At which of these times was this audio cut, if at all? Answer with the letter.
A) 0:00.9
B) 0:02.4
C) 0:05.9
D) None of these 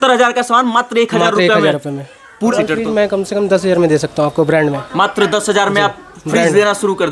B